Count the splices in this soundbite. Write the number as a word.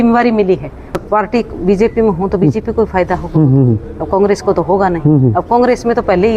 one